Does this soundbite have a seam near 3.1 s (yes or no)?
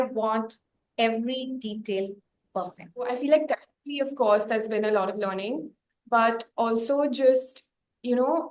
yes